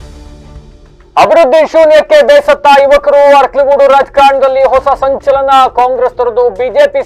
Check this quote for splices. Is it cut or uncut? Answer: cut